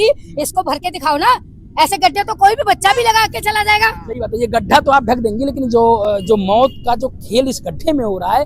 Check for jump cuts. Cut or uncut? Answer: uncut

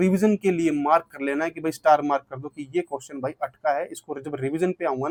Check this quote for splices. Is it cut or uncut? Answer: uncut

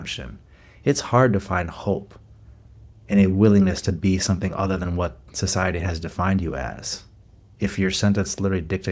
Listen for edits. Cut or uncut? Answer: uncut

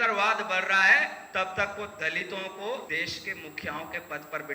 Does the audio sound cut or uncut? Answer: cut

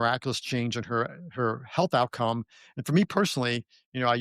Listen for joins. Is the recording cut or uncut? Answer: uncut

